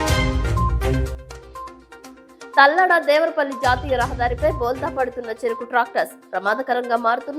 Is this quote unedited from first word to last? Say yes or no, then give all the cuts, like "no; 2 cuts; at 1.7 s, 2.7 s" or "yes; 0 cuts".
no; 1 cut; at 0.9 s